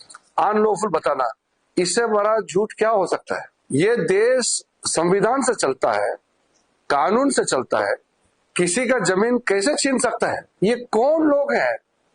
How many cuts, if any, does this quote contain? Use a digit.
2